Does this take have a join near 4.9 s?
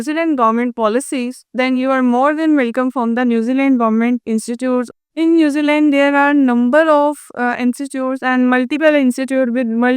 yes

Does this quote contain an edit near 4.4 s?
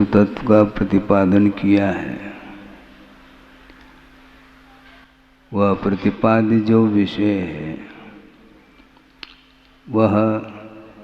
no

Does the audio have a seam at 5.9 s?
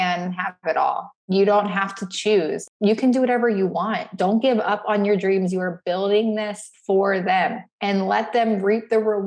no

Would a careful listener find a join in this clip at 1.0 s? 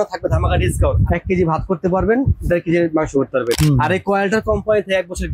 yes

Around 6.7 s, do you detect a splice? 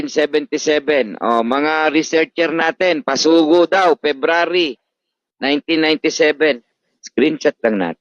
yes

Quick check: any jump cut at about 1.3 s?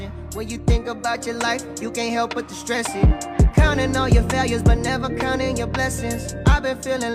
no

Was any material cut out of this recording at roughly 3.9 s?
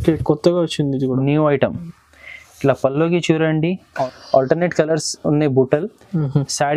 yes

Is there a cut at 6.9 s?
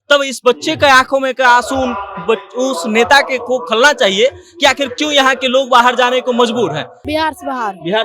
yes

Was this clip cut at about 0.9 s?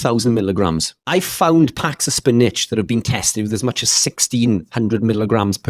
yes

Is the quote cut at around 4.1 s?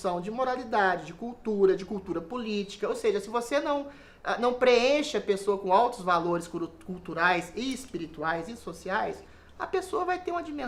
no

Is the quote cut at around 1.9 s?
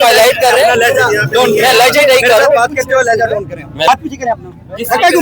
no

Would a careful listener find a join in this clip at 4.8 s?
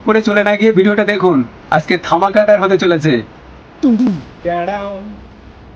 no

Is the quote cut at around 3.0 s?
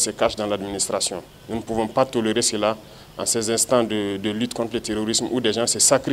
no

